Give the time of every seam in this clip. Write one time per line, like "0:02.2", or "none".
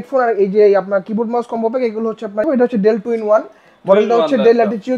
0:02.4